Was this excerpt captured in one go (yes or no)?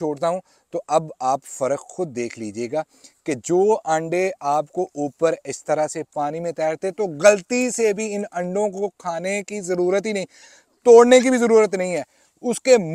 yes